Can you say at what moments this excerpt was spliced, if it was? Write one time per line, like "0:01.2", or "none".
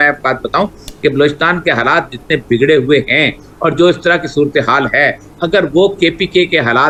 none